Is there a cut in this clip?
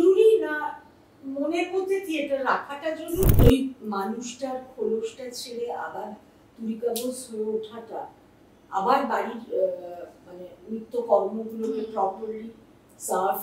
yes; 1 cut; at 3.3 s

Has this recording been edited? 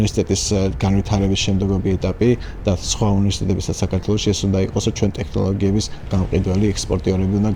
no; 0 cuts

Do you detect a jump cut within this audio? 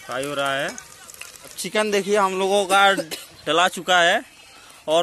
yes; 1 cut; at 1.6 s

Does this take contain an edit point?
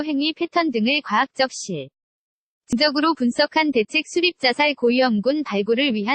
yes; 1 cut; at 2.7 s

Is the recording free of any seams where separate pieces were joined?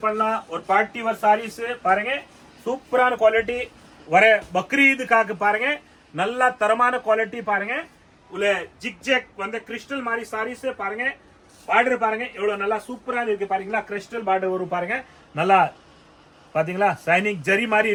yes; 0 cuts

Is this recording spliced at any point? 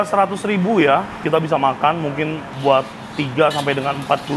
yes; 2 cuts; at 1.2 s, 2.5 s

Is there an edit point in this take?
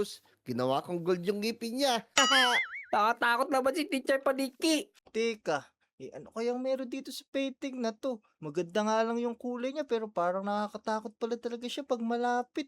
yes; 1 cut; at 5.0 s

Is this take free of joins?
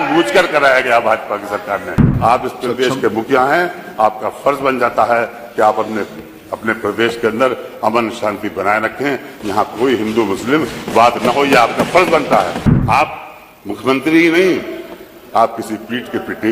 no; 2 cuts; at 2.0 s, 12.7 s

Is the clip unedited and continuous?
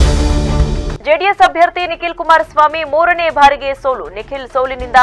yes; 0 cuts

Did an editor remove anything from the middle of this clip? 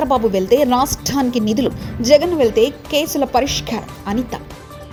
no; 0 cuts

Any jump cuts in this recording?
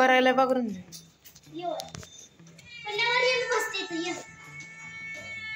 no; 0 cuts

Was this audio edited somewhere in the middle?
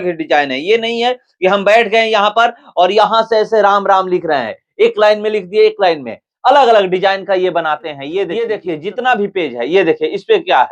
yes; 1 cut; at 8.5 s

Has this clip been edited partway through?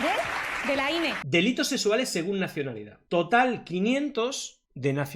yes; 2 cuts; at 1.2 s, 3.0 s

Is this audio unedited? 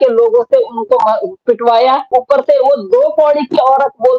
no; 1 cut; at 2.1 s

